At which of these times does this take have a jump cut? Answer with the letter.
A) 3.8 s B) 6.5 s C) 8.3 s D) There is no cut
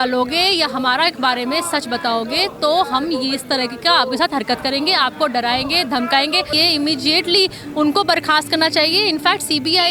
B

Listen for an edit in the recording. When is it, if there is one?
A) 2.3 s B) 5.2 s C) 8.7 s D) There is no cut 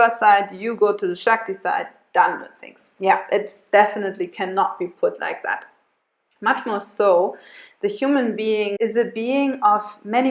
C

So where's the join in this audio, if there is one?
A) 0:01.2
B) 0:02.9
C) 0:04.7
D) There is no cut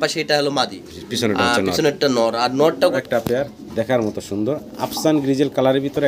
B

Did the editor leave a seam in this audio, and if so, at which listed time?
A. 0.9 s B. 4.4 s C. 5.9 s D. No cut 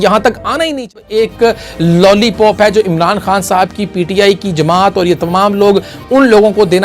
A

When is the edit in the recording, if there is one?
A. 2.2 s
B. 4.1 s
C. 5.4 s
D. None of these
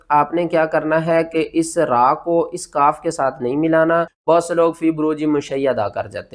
B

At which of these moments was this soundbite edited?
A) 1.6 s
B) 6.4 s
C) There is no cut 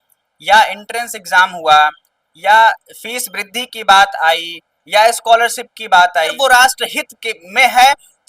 B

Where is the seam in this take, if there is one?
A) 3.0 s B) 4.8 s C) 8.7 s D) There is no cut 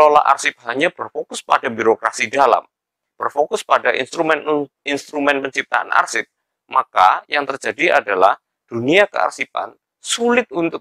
D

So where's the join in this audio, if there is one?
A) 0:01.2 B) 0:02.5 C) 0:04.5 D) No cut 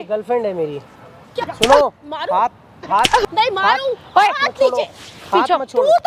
A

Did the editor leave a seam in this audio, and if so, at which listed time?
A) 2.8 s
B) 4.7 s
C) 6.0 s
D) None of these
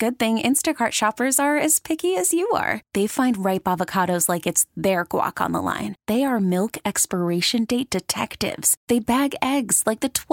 D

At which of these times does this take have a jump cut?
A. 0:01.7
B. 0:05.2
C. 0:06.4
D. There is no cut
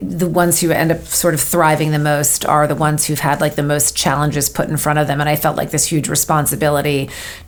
D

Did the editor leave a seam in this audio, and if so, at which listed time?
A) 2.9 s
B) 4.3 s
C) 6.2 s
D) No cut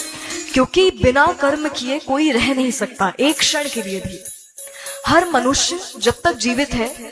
C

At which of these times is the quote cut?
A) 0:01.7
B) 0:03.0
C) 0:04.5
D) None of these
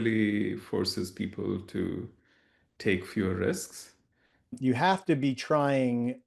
C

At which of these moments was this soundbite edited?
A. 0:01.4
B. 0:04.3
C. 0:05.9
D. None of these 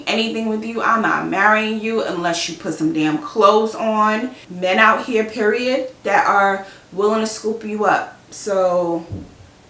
B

